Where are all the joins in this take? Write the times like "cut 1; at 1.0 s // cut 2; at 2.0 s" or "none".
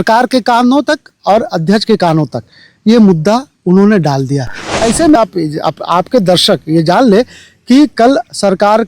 cut 1; at 5.2 s